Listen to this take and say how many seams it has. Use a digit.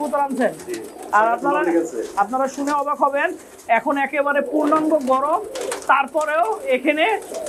1